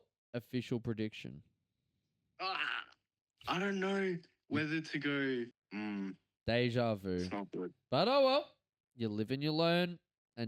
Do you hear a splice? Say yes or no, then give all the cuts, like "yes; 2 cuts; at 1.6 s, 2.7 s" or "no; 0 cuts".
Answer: yes; 1 cut; at 5.6 s